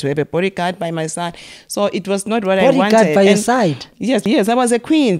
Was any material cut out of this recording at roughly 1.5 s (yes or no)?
no